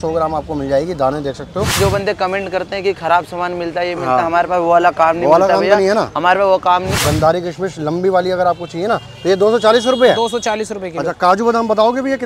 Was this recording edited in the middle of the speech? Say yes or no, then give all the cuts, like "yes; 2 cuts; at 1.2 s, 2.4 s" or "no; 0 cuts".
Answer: yes; 2 cuts; at 1.7 s, 7.0 s